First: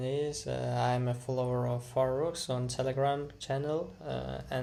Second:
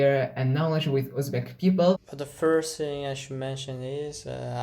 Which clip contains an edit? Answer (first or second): second